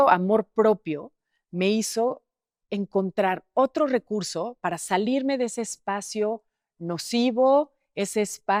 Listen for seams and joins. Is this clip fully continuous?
yes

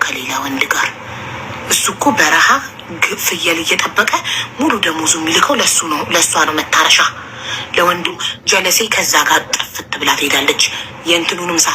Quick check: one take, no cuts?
no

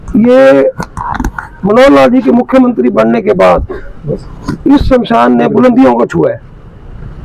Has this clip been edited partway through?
no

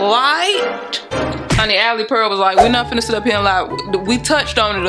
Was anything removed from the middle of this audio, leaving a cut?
yes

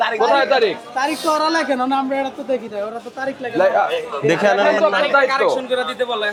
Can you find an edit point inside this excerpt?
no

